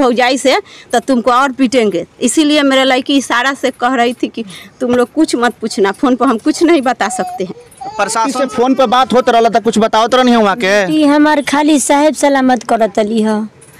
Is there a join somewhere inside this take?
yes; 1 cut; at 8.4 s

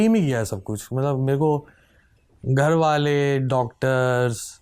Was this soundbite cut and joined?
no; 0 cuts

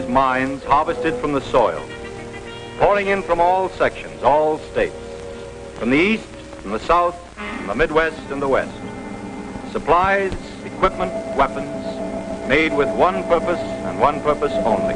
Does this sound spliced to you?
yes; 1 cut; at 4.3 s

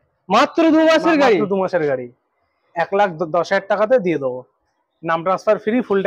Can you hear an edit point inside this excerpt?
no; 0 cuts

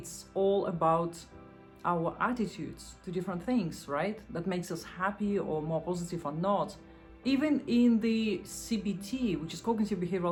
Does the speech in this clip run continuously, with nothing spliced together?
yes; 0 cuts

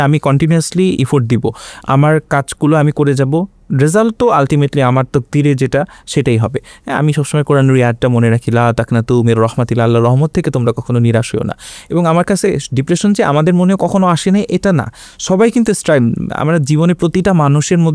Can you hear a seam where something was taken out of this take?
no; 0 cuts

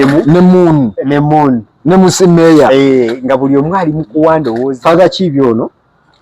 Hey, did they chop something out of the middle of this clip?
yes; 1 cut; at 4.6 s

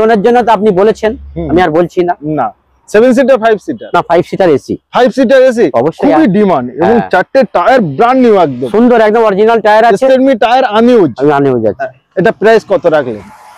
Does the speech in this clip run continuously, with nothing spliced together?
yes; 0 cuts

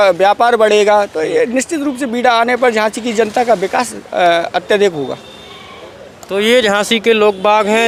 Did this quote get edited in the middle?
no; 0 cuts

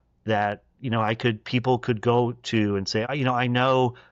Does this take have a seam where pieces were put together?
yes; 1 cut; at 3.1 s

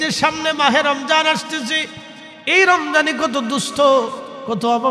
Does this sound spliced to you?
no; 0 cuts

